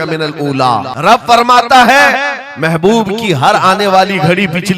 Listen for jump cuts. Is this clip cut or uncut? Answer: cut